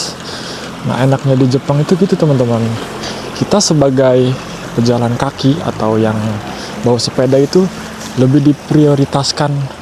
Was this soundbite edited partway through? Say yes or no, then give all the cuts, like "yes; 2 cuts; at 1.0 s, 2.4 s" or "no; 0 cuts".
no; 0 cuts